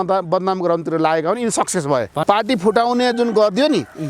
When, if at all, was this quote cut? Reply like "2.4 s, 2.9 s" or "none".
2.1 s